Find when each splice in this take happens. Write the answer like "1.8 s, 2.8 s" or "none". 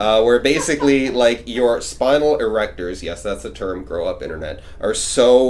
none